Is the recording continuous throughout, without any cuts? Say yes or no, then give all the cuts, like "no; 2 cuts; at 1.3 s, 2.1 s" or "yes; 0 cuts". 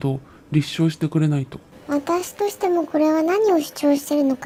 yes; 0 cuts